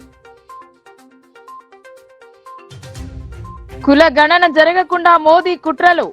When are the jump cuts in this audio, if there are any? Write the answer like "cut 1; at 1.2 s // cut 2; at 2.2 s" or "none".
cut 1; at 1.7 s // cut 2; at 3.8 s